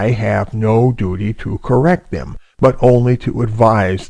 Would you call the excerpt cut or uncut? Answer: uncut